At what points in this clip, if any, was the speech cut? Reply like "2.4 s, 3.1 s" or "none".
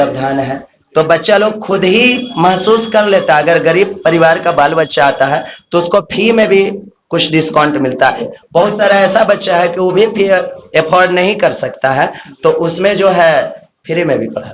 8.2 s